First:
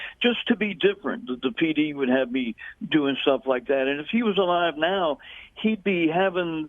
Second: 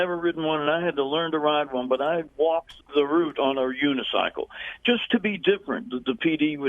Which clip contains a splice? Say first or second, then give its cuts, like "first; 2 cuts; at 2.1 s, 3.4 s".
second; 1 cut; at 2.3 s